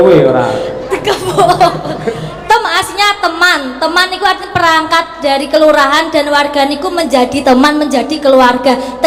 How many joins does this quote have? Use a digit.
0